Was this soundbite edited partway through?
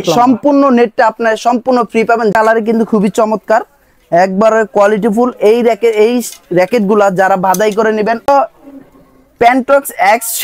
yes; 2 cuts; at 2.3 s, 8.3 s

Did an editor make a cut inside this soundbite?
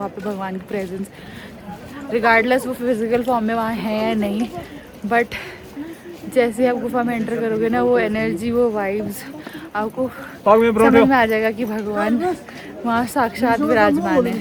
no; 0 cuts

